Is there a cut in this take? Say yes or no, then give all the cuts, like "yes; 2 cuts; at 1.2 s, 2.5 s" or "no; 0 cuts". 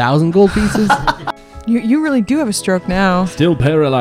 yes; 2 cuts; at 1.1 s, 3.2 s